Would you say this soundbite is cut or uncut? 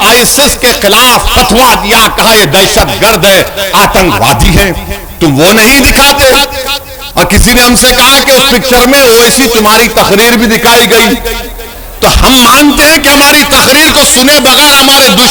uncut